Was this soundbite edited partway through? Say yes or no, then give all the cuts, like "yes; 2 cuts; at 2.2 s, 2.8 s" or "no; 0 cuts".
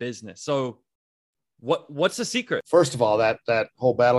yes; 1 cut; at 2.7 s